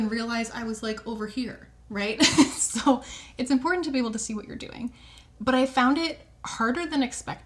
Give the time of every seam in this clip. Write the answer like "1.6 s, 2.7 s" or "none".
none